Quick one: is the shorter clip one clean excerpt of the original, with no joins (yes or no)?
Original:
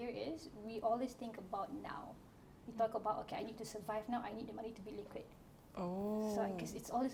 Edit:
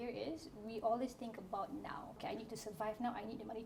no